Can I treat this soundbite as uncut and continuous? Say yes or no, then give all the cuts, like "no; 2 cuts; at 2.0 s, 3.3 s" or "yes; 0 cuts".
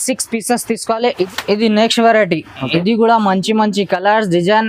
no; 1 cut; at 1.3 s